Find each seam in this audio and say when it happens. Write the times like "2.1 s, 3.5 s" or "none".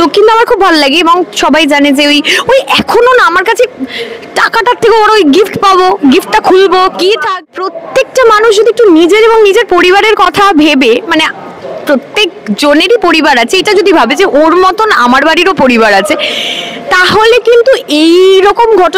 7.5 s